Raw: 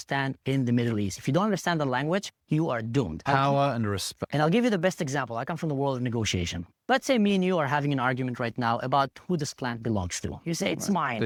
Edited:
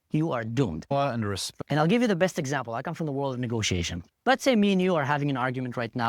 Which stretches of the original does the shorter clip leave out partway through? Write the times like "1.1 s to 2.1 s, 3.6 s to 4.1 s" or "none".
3.5 s to 3.7 s